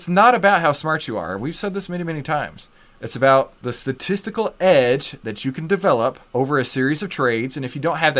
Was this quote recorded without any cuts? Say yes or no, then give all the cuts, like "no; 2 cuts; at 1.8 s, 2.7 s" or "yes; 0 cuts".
no; 2 cuts; at 3.6 s, 6.2 s